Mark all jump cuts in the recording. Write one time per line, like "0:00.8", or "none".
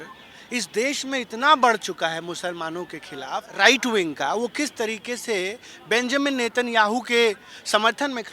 0:03.5